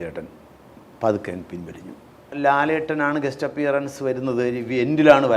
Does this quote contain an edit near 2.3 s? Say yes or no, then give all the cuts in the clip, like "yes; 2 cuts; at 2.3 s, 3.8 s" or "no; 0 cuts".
yes; 1 cut; at 2.3 s